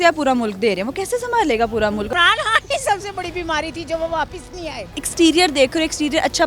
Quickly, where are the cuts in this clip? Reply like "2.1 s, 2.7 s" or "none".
2.1 s, 5.0 s